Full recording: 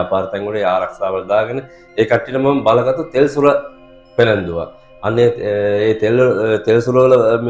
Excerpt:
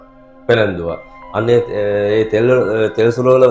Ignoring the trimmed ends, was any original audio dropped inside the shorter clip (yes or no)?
no